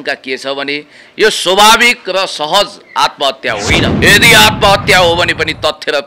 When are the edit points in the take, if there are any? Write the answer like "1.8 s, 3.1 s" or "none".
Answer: 3.9 s